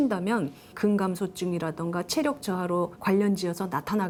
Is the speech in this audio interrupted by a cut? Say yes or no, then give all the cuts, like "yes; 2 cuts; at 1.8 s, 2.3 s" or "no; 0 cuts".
no; 0 cuts